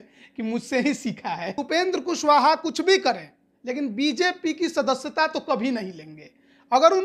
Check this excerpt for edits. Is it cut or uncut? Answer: cut